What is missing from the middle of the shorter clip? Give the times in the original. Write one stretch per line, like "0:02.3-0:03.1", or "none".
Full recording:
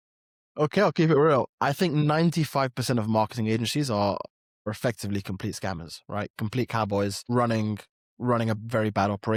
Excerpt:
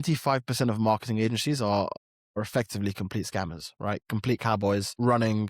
none